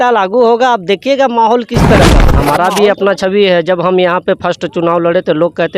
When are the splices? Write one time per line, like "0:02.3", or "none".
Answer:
0:02.3